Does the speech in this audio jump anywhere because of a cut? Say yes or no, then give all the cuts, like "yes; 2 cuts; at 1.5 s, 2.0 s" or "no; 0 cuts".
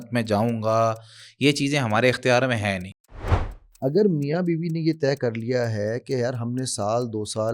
yes; 1 cut; at 3.1 s